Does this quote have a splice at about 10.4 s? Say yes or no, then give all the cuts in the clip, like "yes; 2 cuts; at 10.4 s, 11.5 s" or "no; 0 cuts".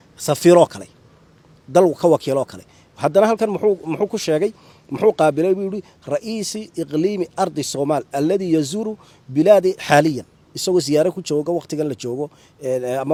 no; 0 cuts